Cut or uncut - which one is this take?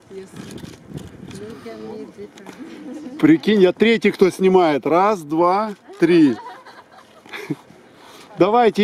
uncut